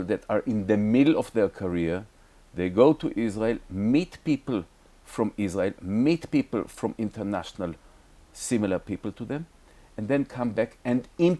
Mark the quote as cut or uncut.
uncut